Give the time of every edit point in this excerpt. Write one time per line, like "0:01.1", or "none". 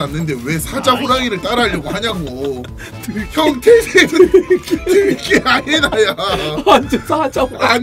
none